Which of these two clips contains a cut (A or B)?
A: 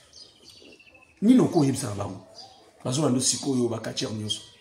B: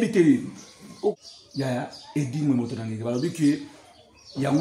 B